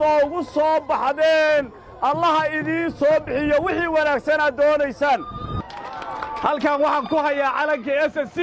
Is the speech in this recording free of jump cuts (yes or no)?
no